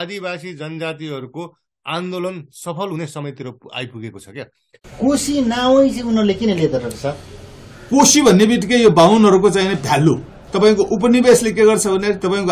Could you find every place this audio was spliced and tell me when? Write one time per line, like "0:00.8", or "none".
0:04.8